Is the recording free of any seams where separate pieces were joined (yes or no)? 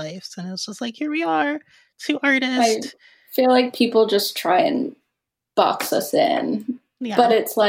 yes